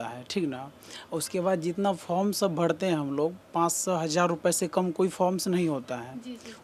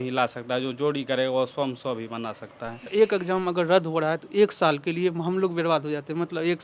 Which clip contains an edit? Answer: second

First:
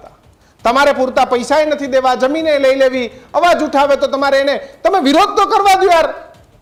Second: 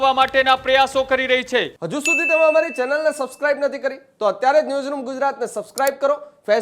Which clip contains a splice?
second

